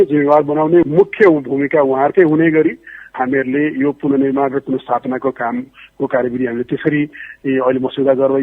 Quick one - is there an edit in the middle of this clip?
no; 0 cuts

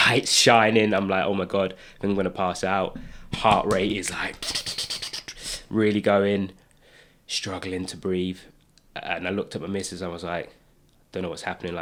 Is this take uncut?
yes; 0 cuts

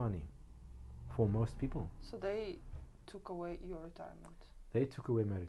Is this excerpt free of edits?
yes; 0 cuts

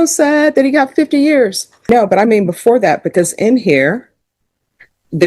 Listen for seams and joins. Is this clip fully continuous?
no; 1 cut; at 1.9 s

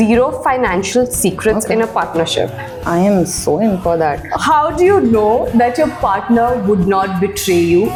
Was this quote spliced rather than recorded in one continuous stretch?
no; 0 cuts

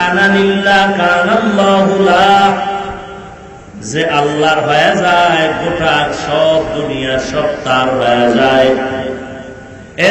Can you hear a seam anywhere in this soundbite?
no; 0 cuts

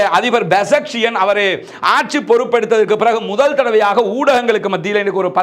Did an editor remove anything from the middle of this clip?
no; 0 cuts

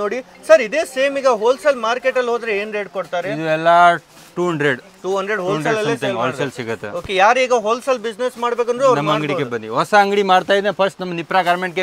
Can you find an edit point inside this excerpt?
no; 0 cuts

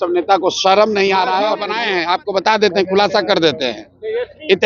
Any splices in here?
yes; 1 cut; at 1.7 s

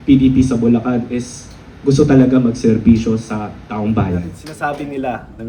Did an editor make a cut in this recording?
yes; 1 cut; at 4.4 s

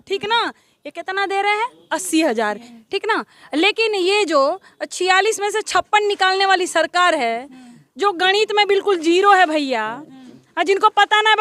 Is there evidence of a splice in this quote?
yes; 1 cut; at 2.6 s

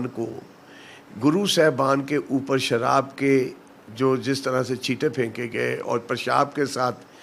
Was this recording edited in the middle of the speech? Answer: no; 0 cuts

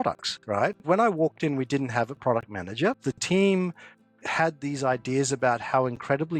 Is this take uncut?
no; 2 cuts; at 0.8 s, 3.1 s

